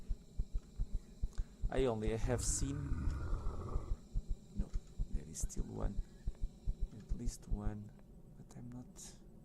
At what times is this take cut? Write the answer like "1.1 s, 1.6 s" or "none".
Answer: 8.1 s